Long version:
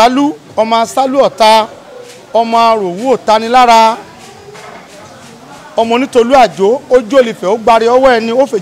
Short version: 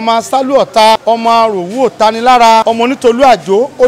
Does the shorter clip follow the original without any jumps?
no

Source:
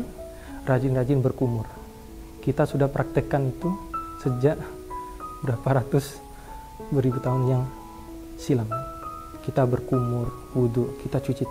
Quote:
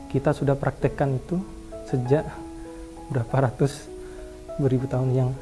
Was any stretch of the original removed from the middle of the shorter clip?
no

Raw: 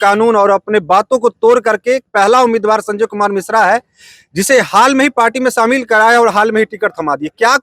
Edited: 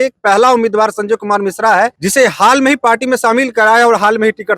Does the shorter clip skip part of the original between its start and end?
yes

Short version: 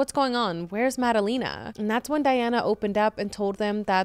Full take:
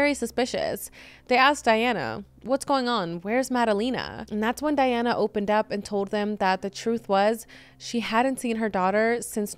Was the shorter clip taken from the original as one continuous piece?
yes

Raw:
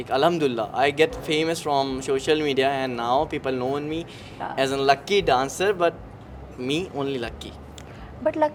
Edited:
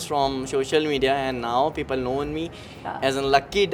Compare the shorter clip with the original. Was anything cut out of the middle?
no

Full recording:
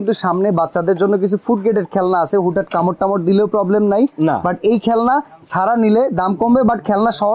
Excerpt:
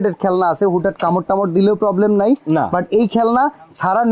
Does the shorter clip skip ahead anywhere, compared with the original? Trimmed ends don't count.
no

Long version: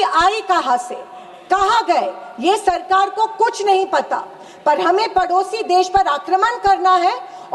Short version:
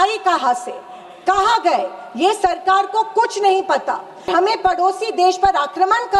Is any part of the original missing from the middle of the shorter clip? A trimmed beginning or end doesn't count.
yes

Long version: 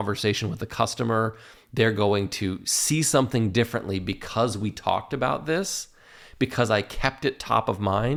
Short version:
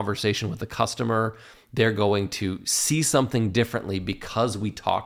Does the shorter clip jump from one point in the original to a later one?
no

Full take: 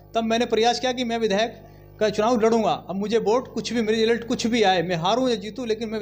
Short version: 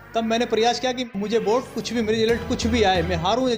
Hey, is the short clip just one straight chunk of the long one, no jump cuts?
no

